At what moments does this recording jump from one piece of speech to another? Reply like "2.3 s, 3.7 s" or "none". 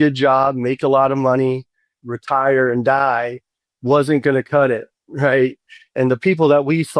2.0 s, 5.9 s